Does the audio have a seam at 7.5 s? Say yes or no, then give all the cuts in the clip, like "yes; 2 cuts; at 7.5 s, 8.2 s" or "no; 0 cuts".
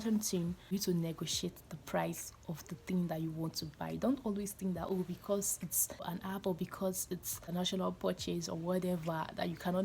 yes; 3 cuts; at 0.7 s, 6.0 s, 7.5 s